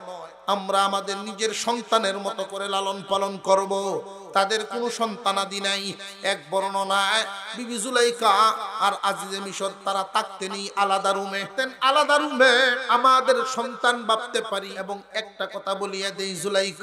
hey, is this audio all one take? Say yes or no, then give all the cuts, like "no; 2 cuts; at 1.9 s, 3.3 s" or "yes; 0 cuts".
no; 3 cuts; at 11.4 s, 12.8 s, 14.7 s